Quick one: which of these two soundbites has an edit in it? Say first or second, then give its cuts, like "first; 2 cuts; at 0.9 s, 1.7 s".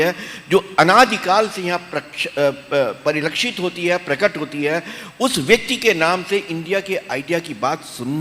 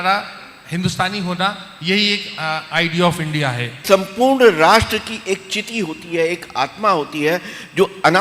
second; 1 cut; at 3.8 s